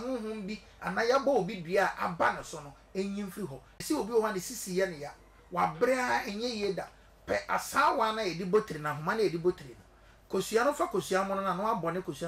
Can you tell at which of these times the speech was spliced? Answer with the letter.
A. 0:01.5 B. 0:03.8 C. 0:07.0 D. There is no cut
B